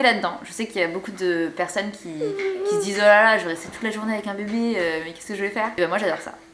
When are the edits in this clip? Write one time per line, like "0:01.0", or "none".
none